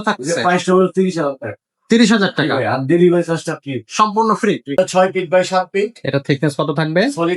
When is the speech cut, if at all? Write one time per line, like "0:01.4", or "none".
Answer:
0:04.8